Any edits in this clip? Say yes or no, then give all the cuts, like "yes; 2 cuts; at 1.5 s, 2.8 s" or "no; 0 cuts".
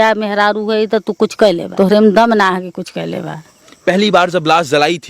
yes; 2 cuts; at 1.7 s, 3.7 s